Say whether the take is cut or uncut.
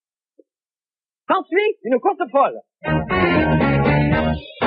uncut